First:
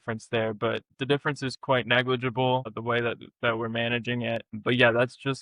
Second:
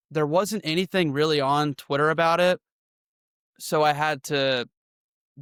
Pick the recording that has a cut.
first; 3 cuts; at 1.0 s, 2.8 s, 4.6 s

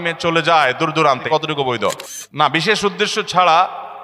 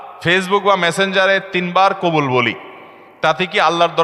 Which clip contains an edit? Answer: first; 2 cuts; at 1.2 s, 2.1 s

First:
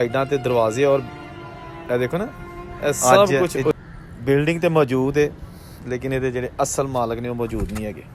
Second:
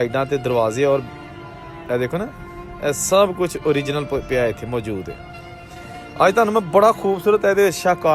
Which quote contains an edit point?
first; 1 cut; at 3.7 s

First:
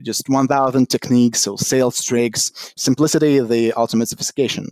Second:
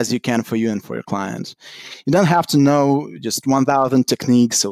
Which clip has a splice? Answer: first; 1 cut; at 2.7 s

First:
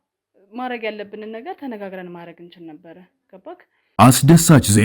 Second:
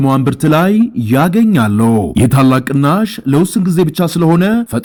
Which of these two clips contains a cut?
first; 1 cut; at 3.8 s

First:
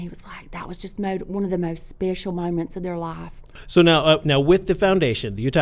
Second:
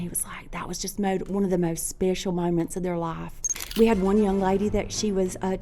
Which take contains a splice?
second; 1 cut; at 3.6 s

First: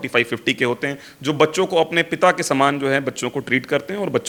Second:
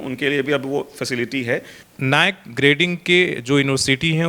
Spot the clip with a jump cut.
second; 1 cut; at 1.8 s

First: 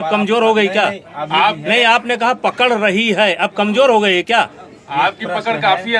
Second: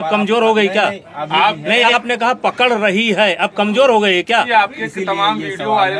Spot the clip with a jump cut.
second; 1 cut; at 4.5 s

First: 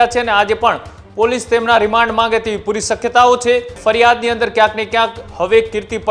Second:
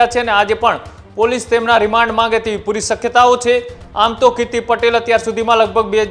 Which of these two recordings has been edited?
first; 1 cut; at 3.7 s

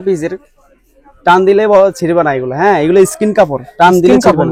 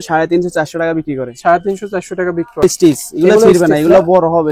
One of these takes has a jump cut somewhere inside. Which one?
second; 1 cut; at 2.6 s

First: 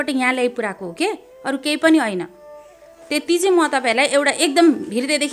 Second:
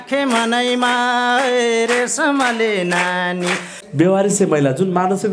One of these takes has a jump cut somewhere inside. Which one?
second; 1 cut; at 3.8 s

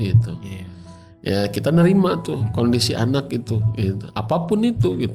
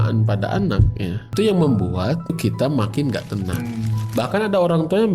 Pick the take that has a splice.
second; 3 cuts; at 1.3 s, 2.4 s, 3.6 s

